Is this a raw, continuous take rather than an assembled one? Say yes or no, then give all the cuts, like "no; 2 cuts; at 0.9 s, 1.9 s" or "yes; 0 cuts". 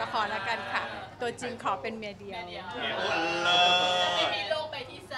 yes; 0 cuts